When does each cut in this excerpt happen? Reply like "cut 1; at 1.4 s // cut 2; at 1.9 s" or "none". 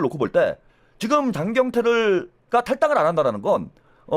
none